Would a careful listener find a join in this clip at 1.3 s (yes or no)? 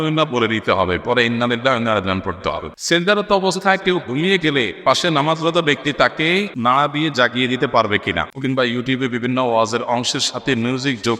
no